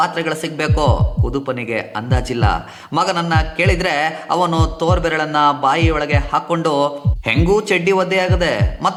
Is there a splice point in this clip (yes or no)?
no